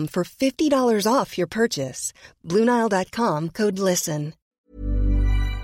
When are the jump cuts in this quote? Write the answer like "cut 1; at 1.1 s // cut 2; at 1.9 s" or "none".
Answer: cut 1; at 4.5 s

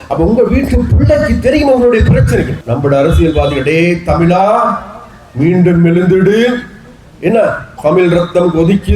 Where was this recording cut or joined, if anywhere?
cut 1; at 2.6 s

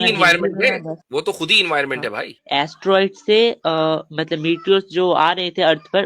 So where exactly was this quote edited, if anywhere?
cut 1; at 1.0 s // cut 2; at 2.3 s

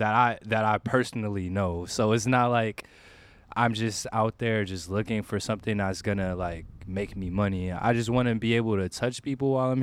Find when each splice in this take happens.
none

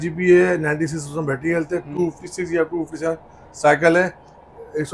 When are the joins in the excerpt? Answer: none

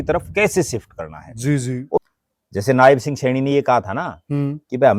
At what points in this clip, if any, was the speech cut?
cut 1; at 2.0 s

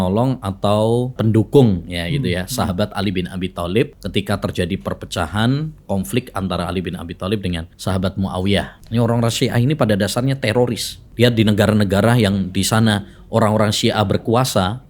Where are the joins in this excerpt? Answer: cut 1; at 1.2 s // cut 2; at 4.0 s // cut 3; at 7.7 s // cut 4; at 8.8 s // cut 5; at 11.0 s

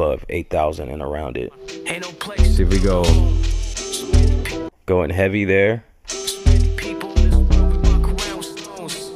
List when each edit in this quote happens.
cut 1; at 1.7 s

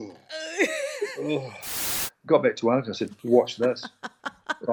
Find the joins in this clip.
cut 1; at 1.6 s

